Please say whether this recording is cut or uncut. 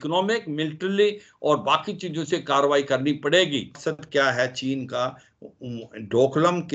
cut